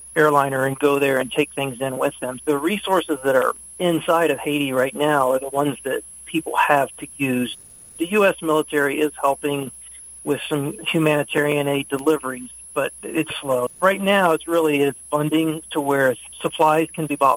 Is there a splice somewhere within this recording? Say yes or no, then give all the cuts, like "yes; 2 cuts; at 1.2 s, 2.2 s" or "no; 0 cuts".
yes; 4 cuts; at 2.3 s, 7.5 s, 10.8 s, 13.7 s